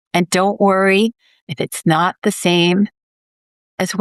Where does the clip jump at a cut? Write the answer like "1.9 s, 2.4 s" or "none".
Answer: none